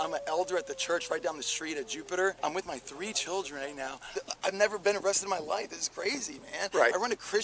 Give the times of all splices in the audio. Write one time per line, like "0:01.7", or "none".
0:02.4
0:04.1